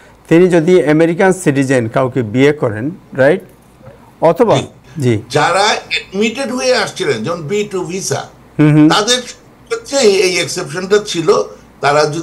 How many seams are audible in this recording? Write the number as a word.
one